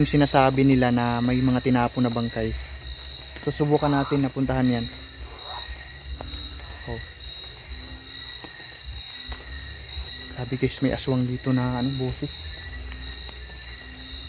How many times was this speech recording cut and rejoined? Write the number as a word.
zero